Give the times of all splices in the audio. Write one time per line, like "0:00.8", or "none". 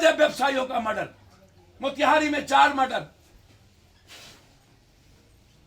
none